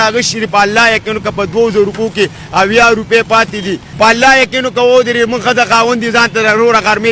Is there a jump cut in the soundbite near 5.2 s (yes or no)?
no